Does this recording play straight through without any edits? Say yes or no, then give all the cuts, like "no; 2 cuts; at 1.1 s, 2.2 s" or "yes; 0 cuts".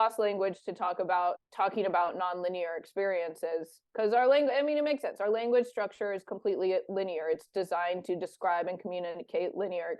no; 1 cut; at 1.1 s